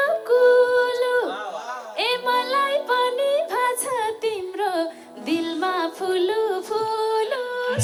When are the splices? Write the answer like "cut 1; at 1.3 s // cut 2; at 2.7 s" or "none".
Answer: none

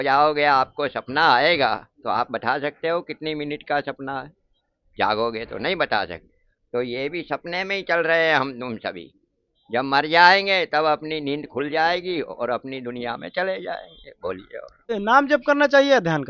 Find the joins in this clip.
cut 1; at 14.9 s

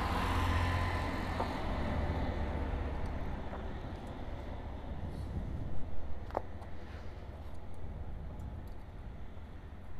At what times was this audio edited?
none

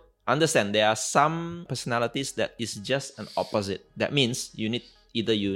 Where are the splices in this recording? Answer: cut 1; at 1.7 s // cut 2; at 3.9 s

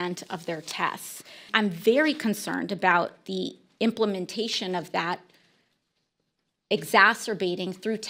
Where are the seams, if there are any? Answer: cut 1; at 1.4 s

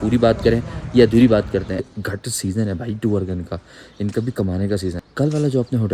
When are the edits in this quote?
cut 1; at 1.8 s // cut 2; at 5.0 s

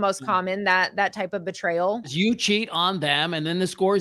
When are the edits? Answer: cut 1; at 2.1 s

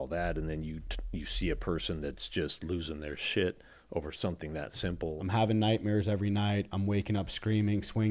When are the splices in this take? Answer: cut 1; at 5.2 s

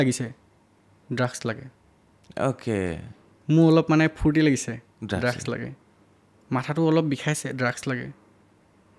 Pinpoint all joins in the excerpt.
none

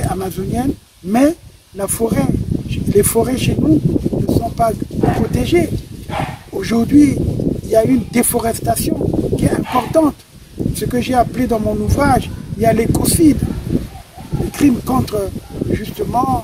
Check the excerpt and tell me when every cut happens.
none

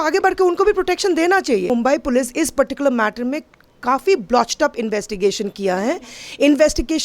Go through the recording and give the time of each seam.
cut 1; at 1.7 s

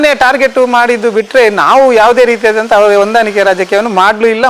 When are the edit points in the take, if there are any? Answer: none

